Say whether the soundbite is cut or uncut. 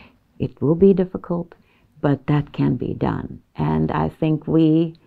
uncut